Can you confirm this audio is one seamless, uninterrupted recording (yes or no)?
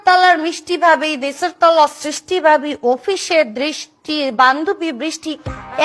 yes